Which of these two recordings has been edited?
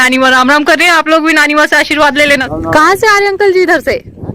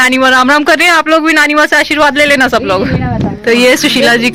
first; 1 cut; at 2.4 s

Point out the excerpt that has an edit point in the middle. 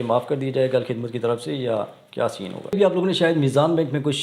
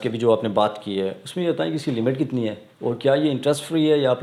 first; 1 cut; at 2.7 s

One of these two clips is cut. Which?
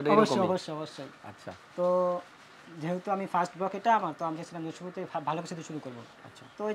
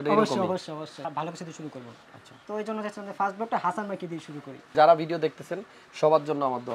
second; 2 cuts; at 1.0 s, 4.7 s

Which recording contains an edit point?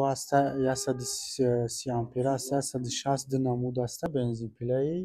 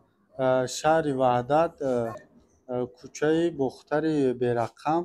first; 1 cut; at 4.1 s

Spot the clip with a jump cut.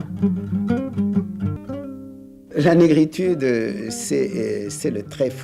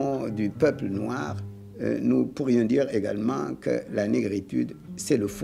first; 1 cut; at 1.6 s

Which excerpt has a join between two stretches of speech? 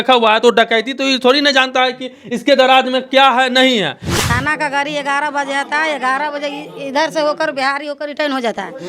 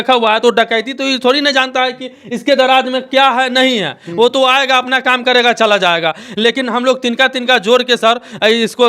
first; 1 cut; at 4.0 s

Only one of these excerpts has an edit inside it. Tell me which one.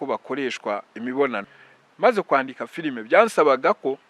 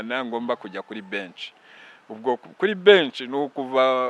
first; 1 cut; at 1.6 s

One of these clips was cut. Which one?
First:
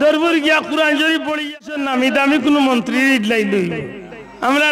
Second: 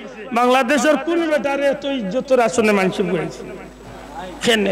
first; 1 cut; at 1.8 s

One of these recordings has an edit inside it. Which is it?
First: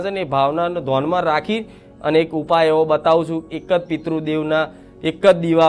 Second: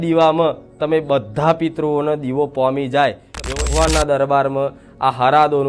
second; 1 cut; at 3.4 s

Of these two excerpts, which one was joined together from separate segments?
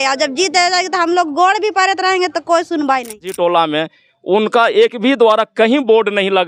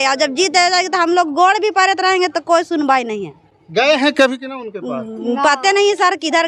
first; 1 cut; at 3.4 s

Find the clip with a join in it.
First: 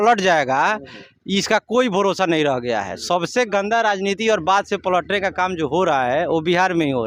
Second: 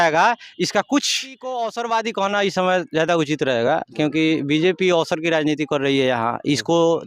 second; 1 cut; at 1.6 s

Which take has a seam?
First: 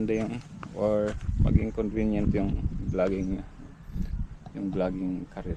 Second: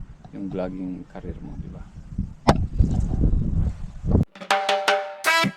second; 1 cut; at 4.3 s

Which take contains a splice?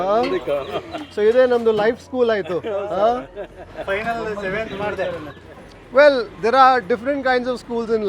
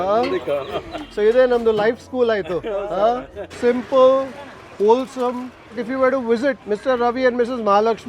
second; 2 cuts; at 3.5 s, 5.8 s

